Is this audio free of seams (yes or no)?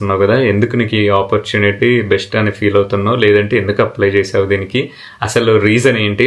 yes